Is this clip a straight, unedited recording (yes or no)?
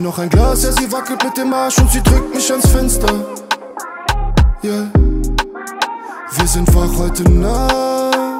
yes